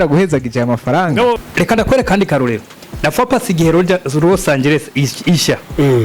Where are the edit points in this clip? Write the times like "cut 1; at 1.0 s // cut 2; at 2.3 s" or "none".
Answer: cut 1; at 1.5 s